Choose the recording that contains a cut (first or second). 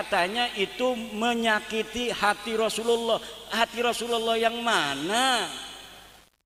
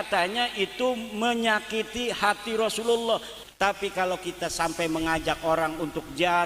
second